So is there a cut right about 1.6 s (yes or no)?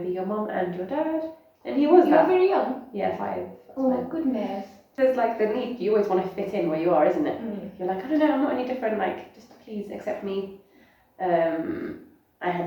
no